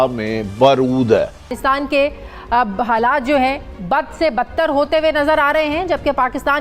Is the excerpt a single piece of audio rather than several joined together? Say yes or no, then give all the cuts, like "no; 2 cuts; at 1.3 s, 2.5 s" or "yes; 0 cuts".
no; 1 cut; at 1.5 s